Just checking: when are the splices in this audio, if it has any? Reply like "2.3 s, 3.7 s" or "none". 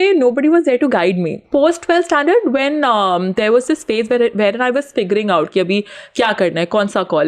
1.4 s